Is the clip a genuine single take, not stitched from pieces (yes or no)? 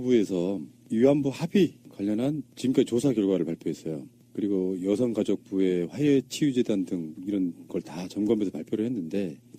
yes